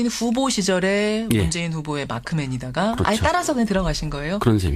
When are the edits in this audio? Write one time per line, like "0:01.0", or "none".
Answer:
0:02.9